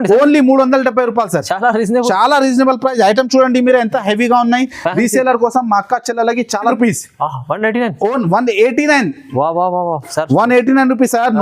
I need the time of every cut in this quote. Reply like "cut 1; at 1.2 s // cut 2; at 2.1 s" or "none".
cut 1; at 6.7 s